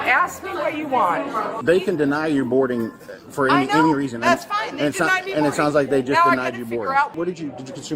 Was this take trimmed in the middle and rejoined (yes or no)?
yes